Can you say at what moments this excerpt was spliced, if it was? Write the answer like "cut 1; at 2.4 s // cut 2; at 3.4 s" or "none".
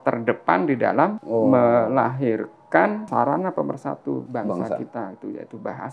cut 1; at 1.2 s // cut 2; at 3.0 s // cut 3; at 4.3 s